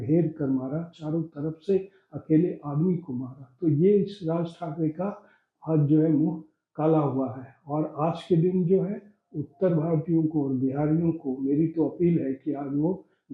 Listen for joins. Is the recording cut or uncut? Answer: uncut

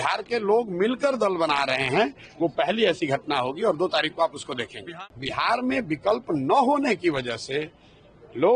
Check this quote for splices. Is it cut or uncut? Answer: cut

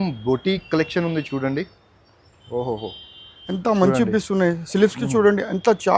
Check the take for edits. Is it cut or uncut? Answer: uncut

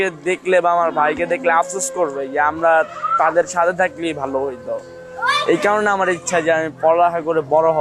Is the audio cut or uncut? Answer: uncut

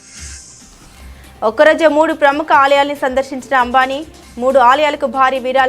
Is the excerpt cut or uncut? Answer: cut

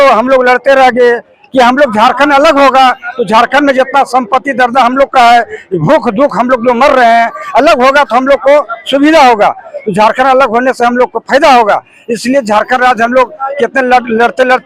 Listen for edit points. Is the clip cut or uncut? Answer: uncut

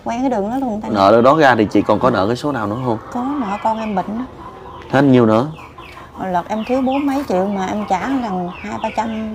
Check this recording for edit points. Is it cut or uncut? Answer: cut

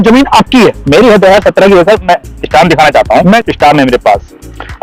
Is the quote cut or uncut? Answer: uncut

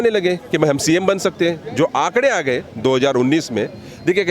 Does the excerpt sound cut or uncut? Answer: uncut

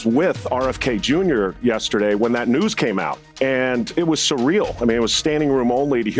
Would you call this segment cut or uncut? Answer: cut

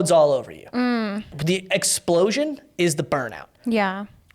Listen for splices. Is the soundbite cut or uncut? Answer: cut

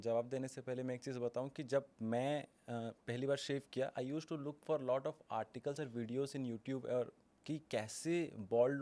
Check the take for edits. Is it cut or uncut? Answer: uncut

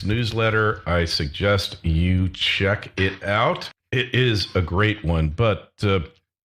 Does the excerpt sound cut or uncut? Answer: uncut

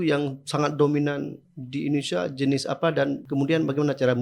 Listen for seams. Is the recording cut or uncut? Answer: cut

